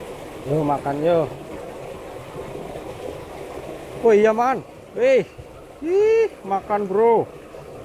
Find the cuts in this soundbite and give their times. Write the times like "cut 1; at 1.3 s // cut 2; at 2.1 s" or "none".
none